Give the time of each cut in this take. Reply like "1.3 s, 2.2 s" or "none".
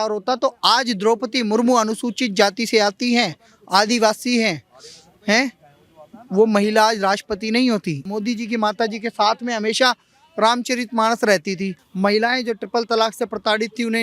8.1 s, 11.9 s